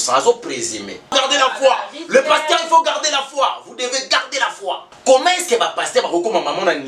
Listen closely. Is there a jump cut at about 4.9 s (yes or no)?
yes